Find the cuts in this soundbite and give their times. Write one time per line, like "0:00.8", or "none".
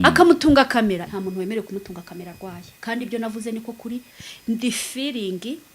0:01.0
0:04.2